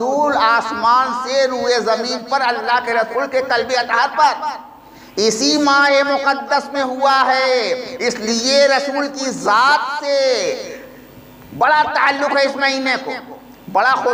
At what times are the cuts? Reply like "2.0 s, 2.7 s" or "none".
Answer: none